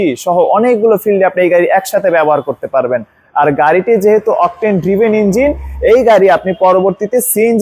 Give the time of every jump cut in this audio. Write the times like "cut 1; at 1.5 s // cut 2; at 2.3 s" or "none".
none